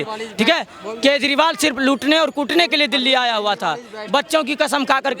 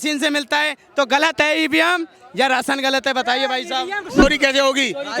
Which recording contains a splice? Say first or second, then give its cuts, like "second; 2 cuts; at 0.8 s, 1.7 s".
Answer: second; 1 cut; at 4.2 s